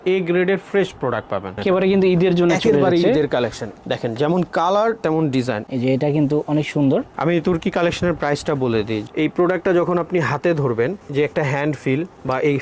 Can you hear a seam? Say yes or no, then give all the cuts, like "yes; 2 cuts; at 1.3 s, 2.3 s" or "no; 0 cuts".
yes; 3 cuts; at 1.6 s, 5.6 s, 9.0 s